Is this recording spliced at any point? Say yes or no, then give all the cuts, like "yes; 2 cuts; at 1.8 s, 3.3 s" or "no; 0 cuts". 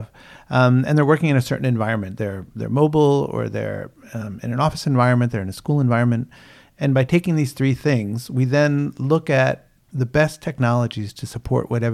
yes; 1 cut; at 9.8 s